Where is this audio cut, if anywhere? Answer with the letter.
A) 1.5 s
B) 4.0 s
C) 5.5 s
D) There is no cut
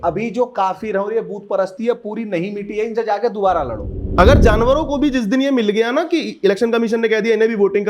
B